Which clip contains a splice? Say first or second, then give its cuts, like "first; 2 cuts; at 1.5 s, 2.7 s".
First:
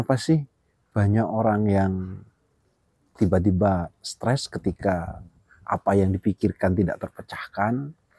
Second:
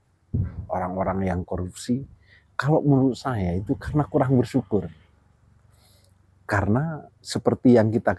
second; 1 cut; at 7.2 s